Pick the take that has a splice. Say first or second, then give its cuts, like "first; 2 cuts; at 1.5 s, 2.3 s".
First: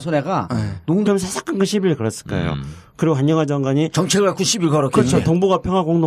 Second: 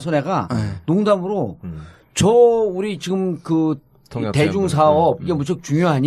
second; 1 cut; at 1.0 s